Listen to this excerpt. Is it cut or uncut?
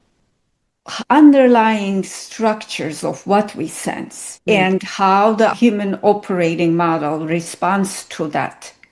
uncut